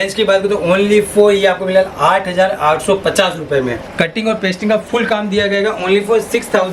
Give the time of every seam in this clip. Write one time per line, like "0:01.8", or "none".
0:03.8

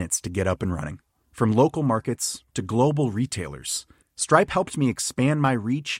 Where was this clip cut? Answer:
none

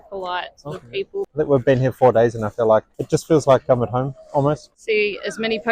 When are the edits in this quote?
0:01.2
0:04.7

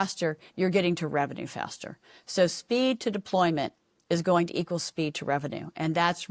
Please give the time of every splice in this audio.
none

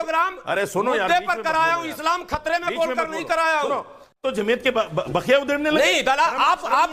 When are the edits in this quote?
0:04.1

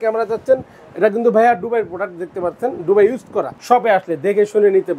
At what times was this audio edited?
0:03.5

